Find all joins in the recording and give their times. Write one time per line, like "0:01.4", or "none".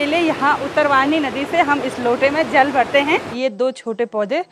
0:03.3